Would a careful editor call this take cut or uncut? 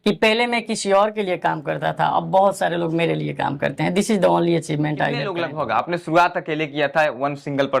cut